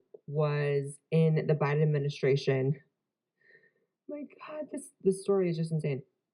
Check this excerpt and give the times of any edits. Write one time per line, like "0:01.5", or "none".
0:02.4